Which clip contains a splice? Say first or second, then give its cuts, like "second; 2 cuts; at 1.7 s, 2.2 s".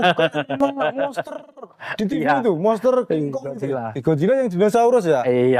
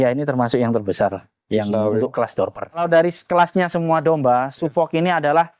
second; 1 cut; at 2.8 s